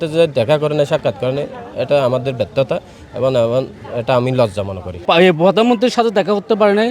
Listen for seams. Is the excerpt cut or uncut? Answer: cut